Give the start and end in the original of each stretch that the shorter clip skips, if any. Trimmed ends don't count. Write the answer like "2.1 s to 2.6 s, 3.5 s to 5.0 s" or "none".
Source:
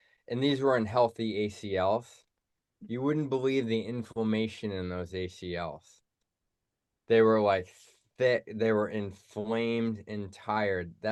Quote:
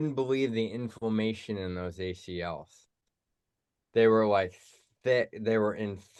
none